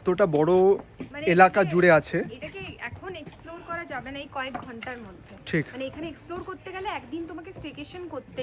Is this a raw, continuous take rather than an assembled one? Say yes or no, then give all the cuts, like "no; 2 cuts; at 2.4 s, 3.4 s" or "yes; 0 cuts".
yes; 0 cuts